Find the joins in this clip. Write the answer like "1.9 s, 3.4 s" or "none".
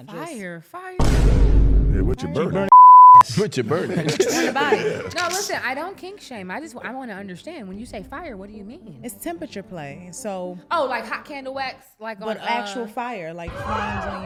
none